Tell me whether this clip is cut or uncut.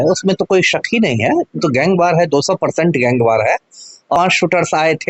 cut